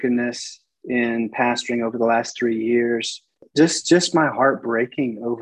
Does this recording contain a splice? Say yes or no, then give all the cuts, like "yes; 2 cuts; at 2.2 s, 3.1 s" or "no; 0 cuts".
yes; 1 cut; at 3.5 s